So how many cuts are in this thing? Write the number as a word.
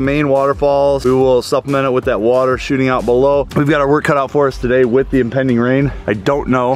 two